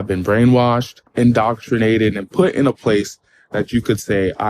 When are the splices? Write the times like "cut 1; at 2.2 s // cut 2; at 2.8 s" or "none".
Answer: cut 1; at 1.0 s